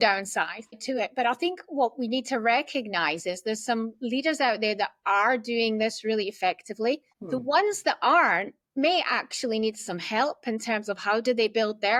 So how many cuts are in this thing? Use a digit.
0